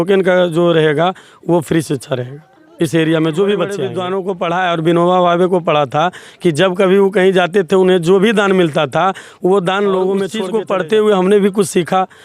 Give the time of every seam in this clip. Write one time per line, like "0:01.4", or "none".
0:03.9
0:10.4